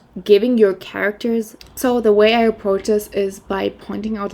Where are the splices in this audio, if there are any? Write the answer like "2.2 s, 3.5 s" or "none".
1.6 s